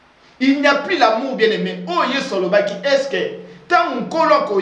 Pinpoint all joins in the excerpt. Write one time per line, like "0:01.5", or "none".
none